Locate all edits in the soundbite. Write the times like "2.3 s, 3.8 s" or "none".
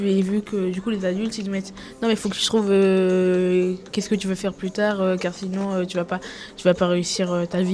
none